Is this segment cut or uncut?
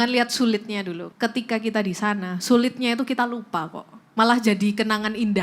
cut